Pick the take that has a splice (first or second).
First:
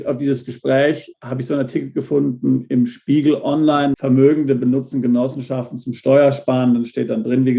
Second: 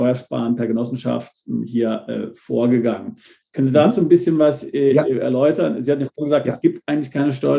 first